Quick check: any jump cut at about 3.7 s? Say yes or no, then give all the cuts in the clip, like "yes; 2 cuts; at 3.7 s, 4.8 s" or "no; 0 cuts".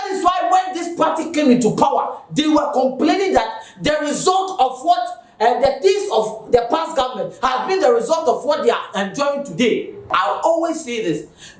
no; 1 cut; at 10.1 s